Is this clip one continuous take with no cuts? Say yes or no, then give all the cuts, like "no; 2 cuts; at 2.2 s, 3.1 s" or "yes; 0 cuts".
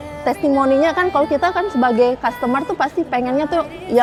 yes; 0 cuts